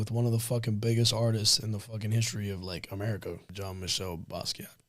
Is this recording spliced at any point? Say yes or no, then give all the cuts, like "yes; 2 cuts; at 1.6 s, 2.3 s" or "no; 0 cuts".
yes; 1 cut; at 3.5 s